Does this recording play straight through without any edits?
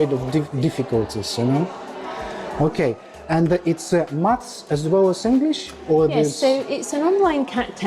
yes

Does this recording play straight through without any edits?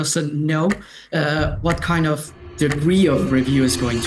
yes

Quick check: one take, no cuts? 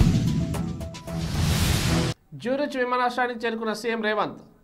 no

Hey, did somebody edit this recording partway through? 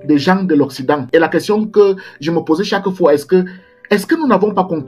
yes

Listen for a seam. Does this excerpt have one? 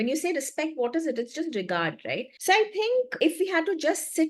yes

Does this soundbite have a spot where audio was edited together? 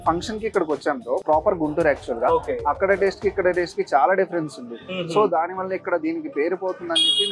yes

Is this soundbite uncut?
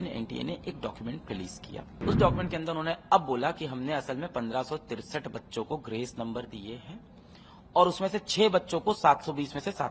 no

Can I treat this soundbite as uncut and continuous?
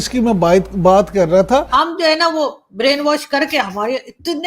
no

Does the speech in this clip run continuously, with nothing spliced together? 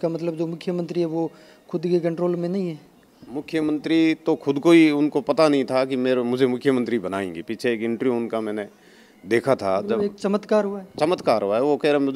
yes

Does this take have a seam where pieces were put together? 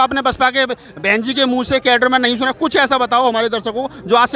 no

